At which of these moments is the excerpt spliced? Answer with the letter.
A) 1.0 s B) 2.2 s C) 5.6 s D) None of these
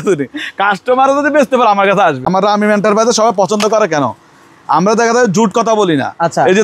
B